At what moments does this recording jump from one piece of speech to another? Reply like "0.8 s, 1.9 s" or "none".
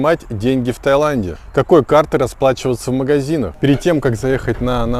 3.5 s